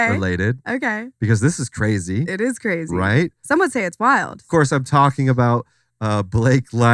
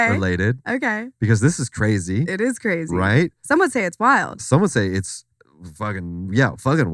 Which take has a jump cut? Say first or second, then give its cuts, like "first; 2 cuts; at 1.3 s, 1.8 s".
first; 1 cut; at 4.4 s